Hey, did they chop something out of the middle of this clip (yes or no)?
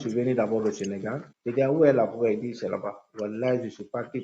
yes